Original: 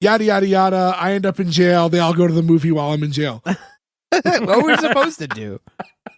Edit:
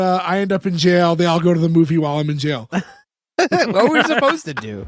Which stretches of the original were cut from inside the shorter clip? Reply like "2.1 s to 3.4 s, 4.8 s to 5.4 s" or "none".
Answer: none